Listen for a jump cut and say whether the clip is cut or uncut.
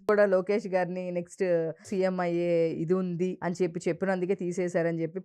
cut